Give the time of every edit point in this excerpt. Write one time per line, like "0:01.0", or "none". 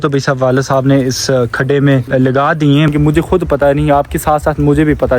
0:02.1
0:02.9